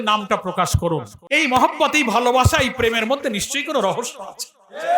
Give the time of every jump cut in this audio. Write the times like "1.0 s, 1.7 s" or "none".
1.1 s

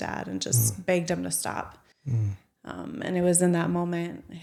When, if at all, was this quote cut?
none

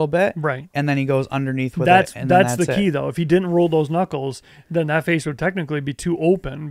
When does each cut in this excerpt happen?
none

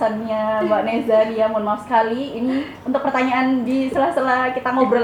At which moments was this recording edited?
none

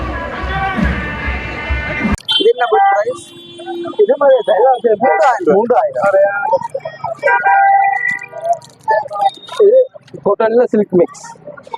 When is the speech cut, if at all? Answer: 2.3 s

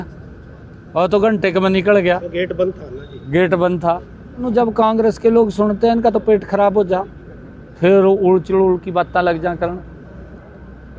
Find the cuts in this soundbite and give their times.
4.5 s

